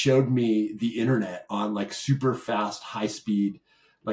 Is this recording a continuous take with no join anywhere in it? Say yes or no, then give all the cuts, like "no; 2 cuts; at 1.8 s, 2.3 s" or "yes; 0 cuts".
yes; 0 cuts